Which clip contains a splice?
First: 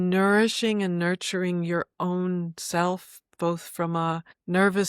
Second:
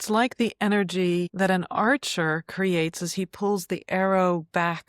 second; 1 cut; at 1.3 s

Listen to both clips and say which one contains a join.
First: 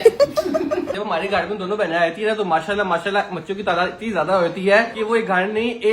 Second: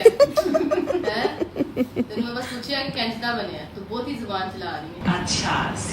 first; 2 cuts; at 0.9 s, 4.9 s

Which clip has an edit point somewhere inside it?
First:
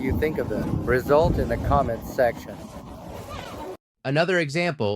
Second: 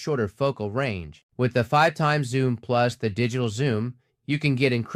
first; 1 cut; at 3.8 s

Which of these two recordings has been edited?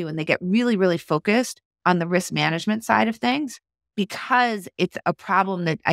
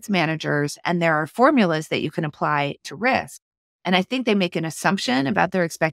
first; 3 cuts; at 1.6 s, 3.8 s, 5.0 s

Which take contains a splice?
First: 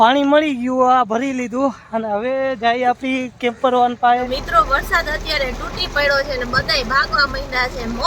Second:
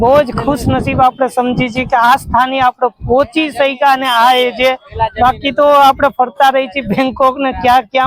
first; 1 cut; at 4.4 s

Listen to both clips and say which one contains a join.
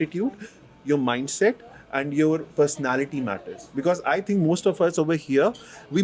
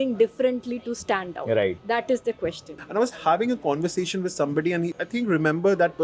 second; 2 cuts; at 1.8 s, 2.7 s

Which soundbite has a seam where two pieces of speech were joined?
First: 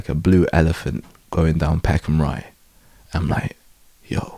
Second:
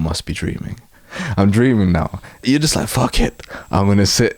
second; 2 cuts; at 1.2 s, 2.4 s

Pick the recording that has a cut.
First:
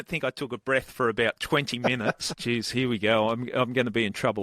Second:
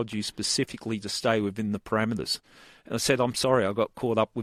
first; 1 cut; at 2.4 s

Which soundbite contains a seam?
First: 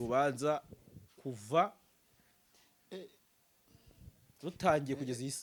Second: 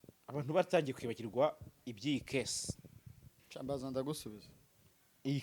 second; 1 cut; at 3.4 s

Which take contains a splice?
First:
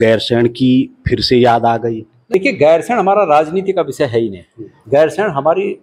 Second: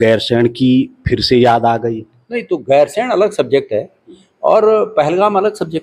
first; 1 cut; at 2.3 s

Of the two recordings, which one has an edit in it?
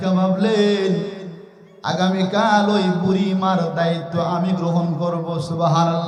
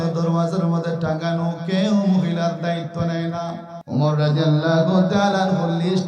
second; 1 cut; at 3.7 s

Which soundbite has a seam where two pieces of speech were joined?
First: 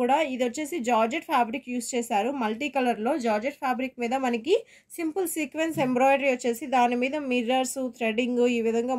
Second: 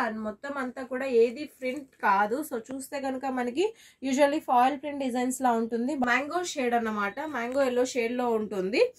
second; 1 cut; at 6.0 s

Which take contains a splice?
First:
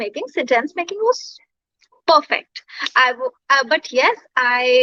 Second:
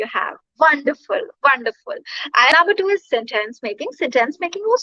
second; 1 cut; at 2.5 s

